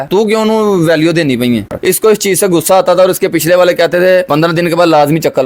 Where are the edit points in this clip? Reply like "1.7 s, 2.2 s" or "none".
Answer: 1.7 s